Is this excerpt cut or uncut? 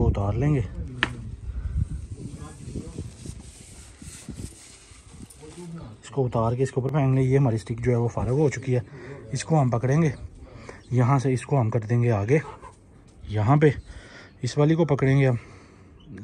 uncut